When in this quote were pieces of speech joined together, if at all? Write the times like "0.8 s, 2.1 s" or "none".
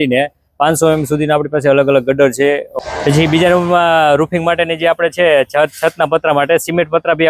2.7 s